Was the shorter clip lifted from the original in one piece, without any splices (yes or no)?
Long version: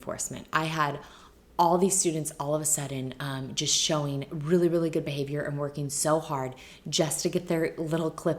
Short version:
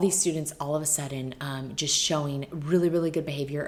yes